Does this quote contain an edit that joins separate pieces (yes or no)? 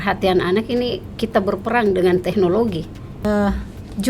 yes